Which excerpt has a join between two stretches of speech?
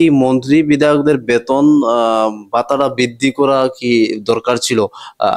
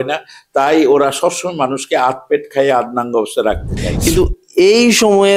second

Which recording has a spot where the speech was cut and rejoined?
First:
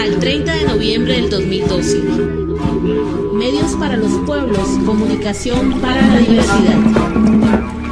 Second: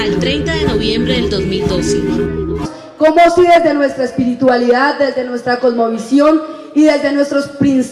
first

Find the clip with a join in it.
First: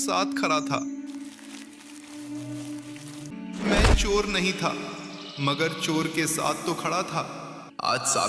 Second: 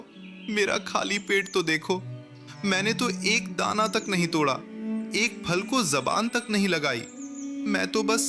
first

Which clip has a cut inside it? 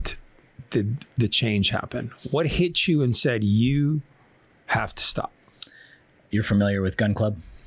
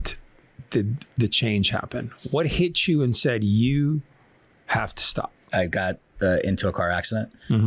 second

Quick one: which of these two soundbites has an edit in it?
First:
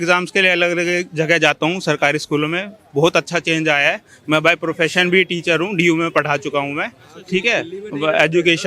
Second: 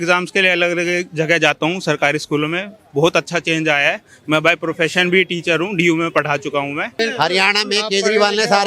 second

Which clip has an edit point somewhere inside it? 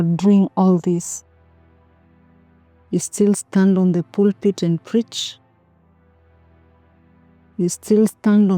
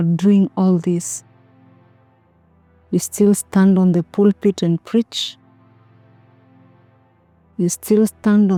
first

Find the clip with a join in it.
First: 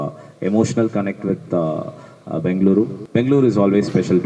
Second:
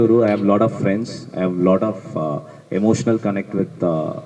first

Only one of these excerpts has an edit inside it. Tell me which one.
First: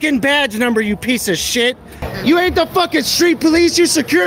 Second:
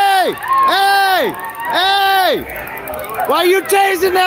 first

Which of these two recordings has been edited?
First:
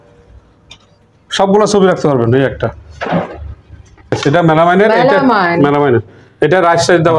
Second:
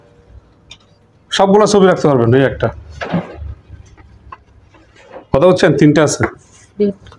first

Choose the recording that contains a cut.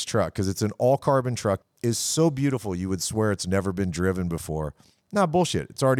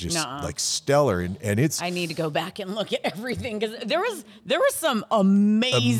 first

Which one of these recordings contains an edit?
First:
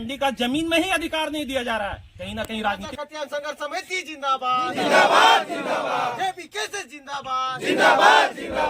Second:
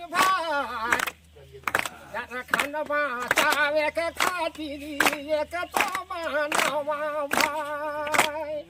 first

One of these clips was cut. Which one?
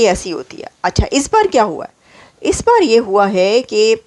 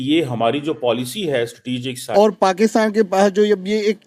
second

